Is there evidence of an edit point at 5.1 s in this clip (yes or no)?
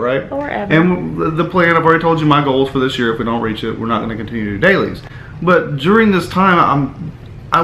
no